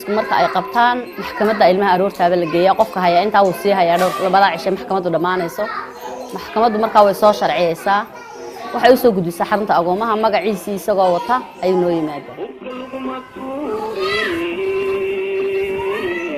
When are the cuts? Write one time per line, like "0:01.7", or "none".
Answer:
none